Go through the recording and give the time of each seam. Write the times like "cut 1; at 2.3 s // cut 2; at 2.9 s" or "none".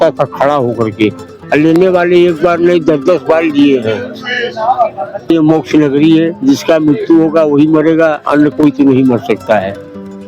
cut 1; at 5.3 s